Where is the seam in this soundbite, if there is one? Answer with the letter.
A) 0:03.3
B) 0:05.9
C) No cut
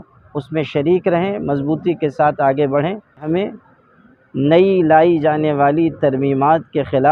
A